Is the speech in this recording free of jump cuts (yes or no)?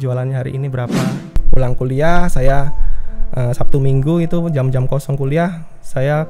no